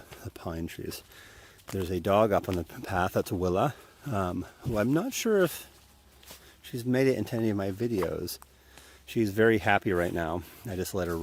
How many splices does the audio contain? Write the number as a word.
one